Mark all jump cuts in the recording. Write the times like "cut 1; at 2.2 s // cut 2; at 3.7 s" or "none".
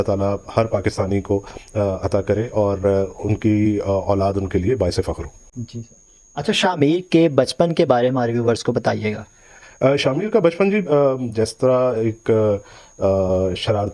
none